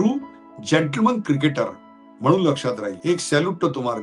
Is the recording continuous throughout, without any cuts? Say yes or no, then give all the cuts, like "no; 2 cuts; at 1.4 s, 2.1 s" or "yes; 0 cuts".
no; 1 cut; at 2.9 s